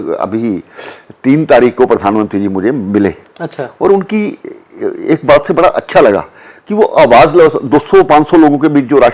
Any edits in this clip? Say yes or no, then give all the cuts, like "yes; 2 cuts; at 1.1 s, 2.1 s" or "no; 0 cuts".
no; 0 cuts